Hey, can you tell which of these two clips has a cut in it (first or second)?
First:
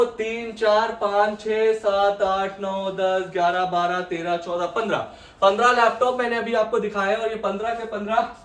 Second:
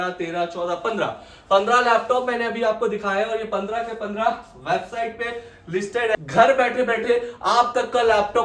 second